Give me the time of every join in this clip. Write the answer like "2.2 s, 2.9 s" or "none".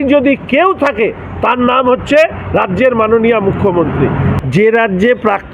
4.4 s